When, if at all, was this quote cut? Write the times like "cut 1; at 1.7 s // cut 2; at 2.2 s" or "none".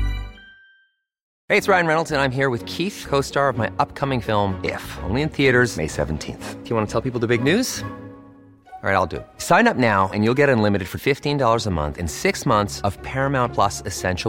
cut 1; at 1.3 s